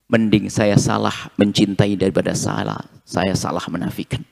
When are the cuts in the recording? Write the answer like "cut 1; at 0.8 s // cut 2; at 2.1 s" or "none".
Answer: none